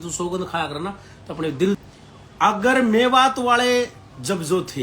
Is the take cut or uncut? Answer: cut